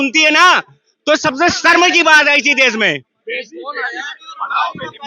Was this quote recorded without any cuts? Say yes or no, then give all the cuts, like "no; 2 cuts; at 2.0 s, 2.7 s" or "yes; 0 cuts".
yes; 0 cuts